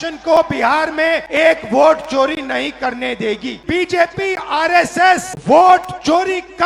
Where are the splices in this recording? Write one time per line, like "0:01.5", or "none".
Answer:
0:01.3
0:03.6
0:05.3